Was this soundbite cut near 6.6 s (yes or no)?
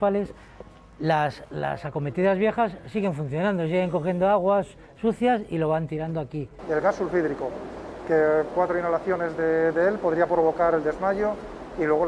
yes